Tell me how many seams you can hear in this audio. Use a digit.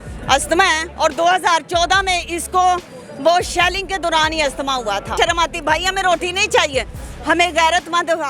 1